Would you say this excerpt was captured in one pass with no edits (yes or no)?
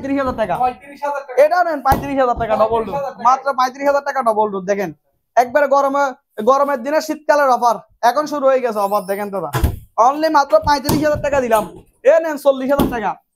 yes